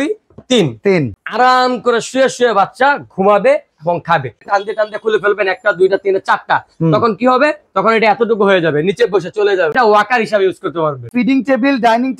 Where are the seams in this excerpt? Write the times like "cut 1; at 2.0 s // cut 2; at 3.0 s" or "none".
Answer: cut 1; at 1.2 s // cut 2; at 4.4 s // cut 3; at 9.7 s // cut 4; at 11.1 s